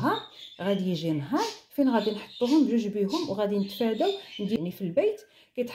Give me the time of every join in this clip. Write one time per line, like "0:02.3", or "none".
0:04.6